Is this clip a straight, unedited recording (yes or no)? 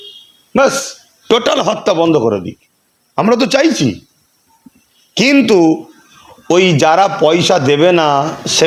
yes